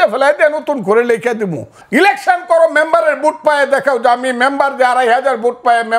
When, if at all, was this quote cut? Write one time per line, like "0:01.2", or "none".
0:01.7